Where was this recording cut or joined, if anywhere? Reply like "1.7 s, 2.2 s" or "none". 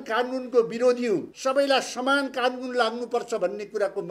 1.3 s